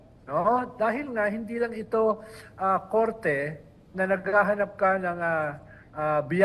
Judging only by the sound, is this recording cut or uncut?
uncut